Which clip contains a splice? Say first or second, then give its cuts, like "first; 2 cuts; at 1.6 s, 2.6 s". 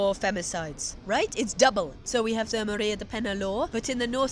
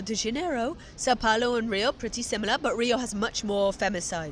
first; 1 cut; at 2.0 s